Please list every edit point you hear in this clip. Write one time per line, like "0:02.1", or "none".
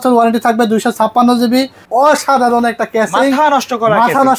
0:01.8